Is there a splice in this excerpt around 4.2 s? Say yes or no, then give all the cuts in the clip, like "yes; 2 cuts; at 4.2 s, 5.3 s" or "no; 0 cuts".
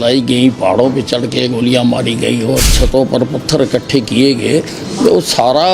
no; 1 cut; at 2.7 s